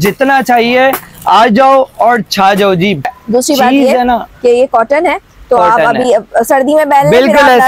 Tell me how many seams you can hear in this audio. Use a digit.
1